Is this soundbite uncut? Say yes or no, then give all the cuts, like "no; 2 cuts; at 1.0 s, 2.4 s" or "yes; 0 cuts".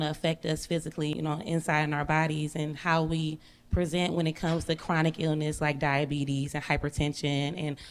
no; 1 cut; at 1.2 s